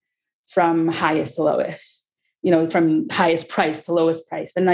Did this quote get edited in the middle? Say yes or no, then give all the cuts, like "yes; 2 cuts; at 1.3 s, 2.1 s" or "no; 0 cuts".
yes; 1 cut; at 2.7 s